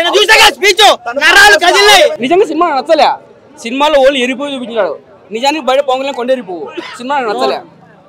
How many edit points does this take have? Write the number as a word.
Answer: one